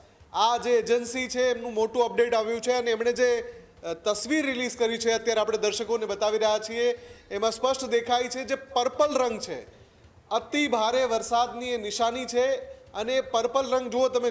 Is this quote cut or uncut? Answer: uncut